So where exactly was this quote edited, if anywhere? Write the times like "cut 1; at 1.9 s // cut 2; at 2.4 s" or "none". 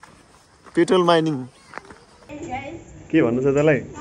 cut 1; at 2.3 s